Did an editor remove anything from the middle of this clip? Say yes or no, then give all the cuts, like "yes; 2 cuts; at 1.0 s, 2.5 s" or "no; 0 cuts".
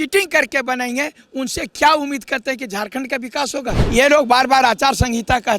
yes; 1 cut; at 3.8 s